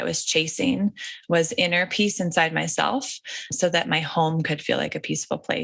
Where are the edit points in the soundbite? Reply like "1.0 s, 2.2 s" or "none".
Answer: 3.5 s